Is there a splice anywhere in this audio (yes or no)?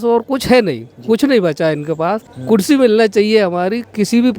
yes